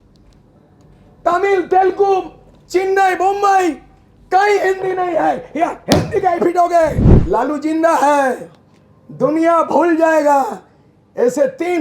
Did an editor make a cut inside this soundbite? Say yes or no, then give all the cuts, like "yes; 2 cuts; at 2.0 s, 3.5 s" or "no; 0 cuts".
yes; 1 cut; at 7.1 s